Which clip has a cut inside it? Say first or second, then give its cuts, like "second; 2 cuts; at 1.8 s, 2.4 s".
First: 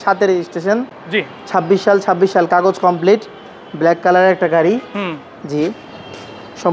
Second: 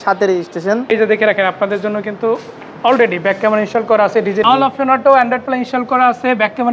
second; 2 cuts; at 0.9 s, 4.4 s